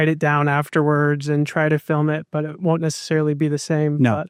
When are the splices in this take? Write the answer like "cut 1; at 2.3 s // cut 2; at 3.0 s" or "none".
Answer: none